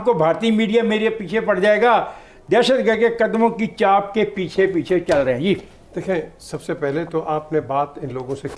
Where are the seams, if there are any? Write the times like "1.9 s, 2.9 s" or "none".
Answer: none